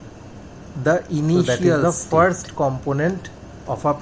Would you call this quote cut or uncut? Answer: cut